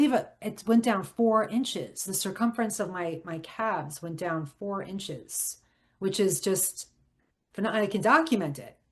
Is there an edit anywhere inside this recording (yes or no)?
no